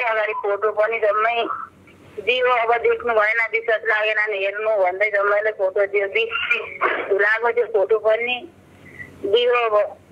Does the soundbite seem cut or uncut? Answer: uncut